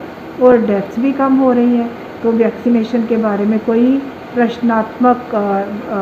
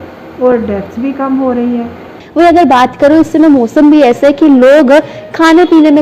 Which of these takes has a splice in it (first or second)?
second